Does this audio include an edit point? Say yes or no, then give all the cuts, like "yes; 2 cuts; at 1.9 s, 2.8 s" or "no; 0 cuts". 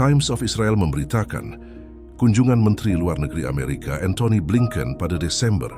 no; 0 cuts